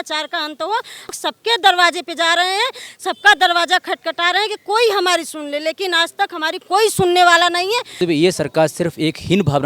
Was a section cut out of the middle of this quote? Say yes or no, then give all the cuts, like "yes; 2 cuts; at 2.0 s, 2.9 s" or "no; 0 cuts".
yes; 2 cuts; at 1.1 s, 8.0 s